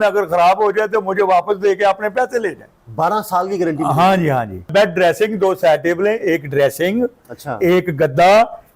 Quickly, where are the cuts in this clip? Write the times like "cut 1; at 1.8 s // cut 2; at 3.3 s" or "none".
cut 1; at 4.7 s